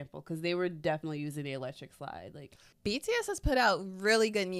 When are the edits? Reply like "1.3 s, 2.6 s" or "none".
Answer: 2.7 s